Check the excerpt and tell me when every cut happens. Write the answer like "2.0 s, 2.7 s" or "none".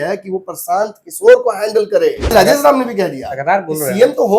2.3 s

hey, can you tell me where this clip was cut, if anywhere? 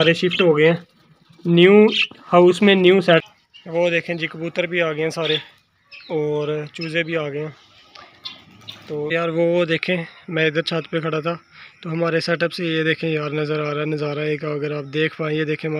3.2 s, 9.1 s

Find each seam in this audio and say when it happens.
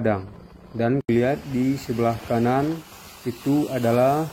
1.1 s

